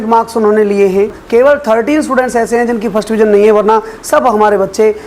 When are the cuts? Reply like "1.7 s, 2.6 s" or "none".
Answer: 1.2 s